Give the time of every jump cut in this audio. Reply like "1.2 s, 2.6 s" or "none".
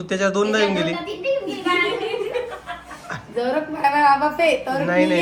none

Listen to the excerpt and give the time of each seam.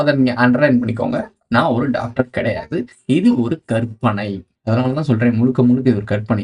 4.4 s

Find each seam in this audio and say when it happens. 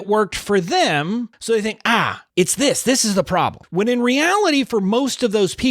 1.3 s, 2.2 s, 3.6 s

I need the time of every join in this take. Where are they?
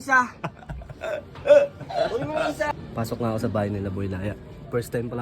2.7 s

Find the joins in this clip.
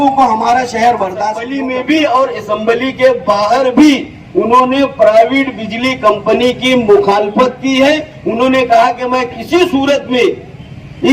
1.6 s

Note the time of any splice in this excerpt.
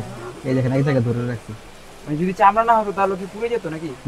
none

